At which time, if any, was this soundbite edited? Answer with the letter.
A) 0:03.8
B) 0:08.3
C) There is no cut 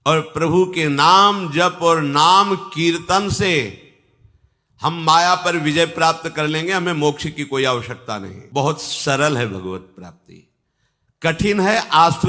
C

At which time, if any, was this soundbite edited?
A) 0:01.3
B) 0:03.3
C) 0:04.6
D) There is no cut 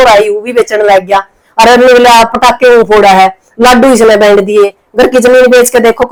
D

